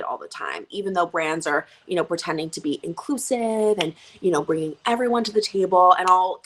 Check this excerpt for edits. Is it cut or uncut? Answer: uncut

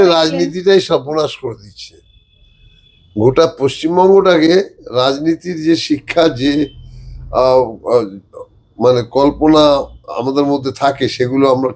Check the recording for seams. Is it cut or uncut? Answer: uncut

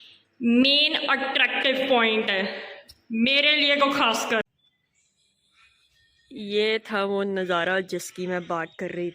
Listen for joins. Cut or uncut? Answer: cut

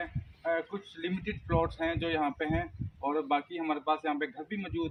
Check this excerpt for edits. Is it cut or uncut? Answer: uncut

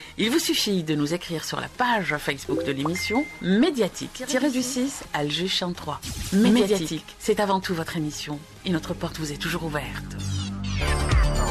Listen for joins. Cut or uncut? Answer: cut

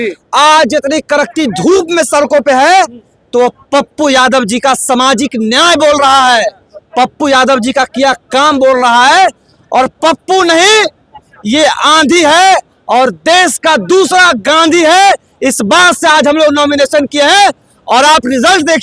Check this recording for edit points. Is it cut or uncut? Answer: uncut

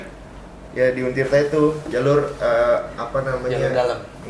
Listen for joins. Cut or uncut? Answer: uncut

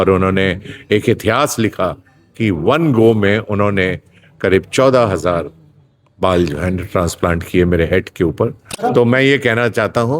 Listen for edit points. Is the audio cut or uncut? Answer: cut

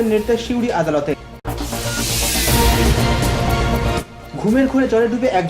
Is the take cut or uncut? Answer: cut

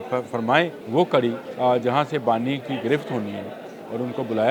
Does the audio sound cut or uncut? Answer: cut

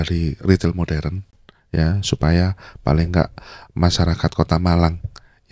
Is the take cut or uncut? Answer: uncut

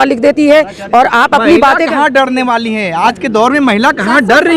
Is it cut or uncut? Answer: uncut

